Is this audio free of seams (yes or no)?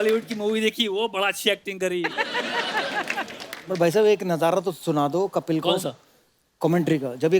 yes